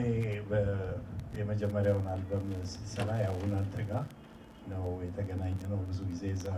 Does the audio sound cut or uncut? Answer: uncut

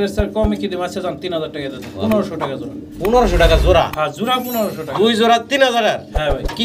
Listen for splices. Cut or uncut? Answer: uncut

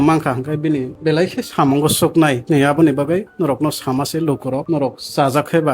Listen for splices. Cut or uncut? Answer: cut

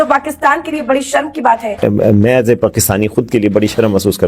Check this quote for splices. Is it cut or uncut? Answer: cut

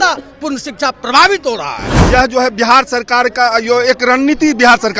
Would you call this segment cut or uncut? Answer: cut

